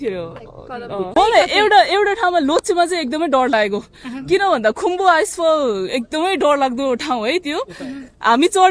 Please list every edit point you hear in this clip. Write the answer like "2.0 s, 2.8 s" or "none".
1.1 s